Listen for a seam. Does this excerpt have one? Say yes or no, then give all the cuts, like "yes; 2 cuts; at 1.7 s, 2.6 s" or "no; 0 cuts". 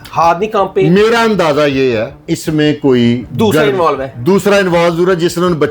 yes; 2 cuts; at 2.1 s, 3.3 s